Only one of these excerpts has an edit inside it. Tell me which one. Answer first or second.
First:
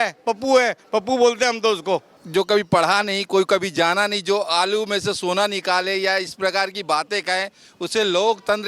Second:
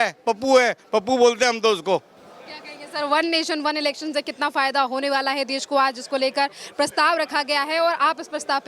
first